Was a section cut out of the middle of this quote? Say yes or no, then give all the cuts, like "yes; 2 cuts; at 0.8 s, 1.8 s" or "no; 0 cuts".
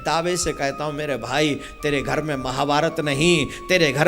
no; 0 cuts